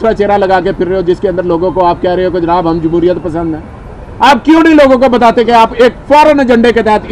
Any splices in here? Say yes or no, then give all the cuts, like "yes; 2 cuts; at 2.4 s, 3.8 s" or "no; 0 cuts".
no; 0 cuts